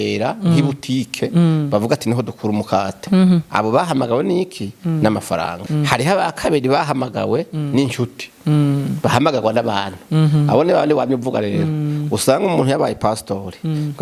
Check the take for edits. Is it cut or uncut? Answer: cut